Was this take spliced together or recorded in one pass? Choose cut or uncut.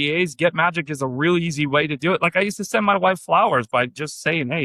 uncut